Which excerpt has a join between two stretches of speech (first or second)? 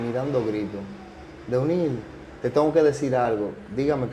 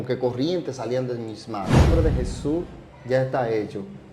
second